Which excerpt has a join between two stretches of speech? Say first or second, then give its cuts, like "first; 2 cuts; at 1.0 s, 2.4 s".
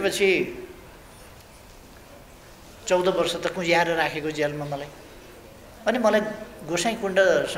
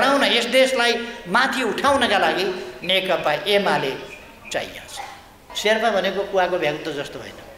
second; 1 cut; at 5.4 s